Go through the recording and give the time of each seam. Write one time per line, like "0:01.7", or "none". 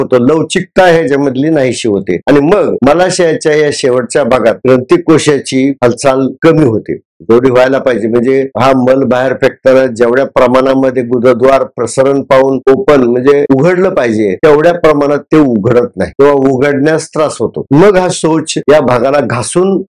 none